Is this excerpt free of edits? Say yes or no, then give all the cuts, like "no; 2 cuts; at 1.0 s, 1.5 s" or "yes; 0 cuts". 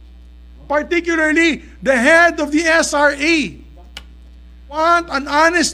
no; 1 cut; at 4.8 s